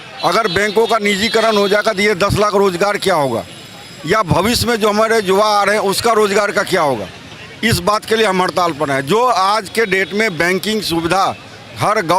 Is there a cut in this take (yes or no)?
no